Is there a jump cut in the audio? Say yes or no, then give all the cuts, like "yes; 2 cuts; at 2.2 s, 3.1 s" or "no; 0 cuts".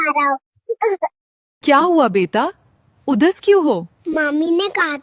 yes; 1 cut; at 1.4 s